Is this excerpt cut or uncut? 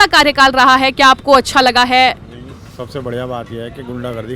uncut